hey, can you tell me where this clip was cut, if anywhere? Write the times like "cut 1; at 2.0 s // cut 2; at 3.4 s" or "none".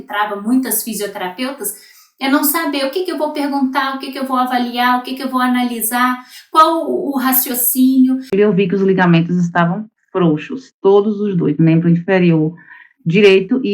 cut 1; at 8.3 s